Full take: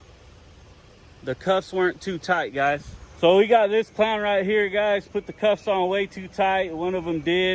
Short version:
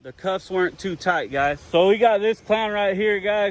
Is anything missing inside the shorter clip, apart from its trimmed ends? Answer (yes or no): yes